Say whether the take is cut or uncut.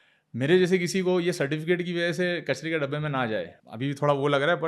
cut